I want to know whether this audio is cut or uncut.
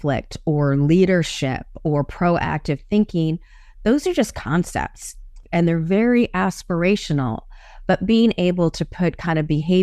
cut